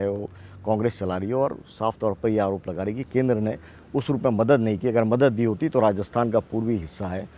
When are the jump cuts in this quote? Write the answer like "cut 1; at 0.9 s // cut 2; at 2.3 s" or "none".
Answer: none